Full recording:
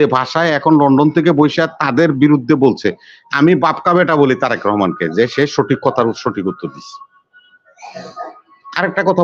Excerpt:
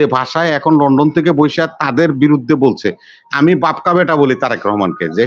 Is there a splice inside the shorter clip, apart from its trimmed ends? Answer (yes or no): no